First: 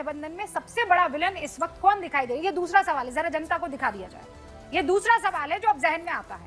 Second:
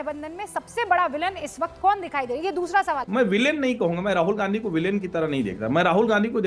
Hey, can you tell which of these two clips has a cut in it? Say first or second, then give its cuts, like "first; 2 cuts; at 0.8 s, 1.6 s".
second; 1 cut; at 3.0 s